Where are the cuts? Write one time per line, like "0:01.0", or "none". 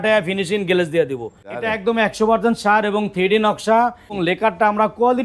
0:01.6
0:04.2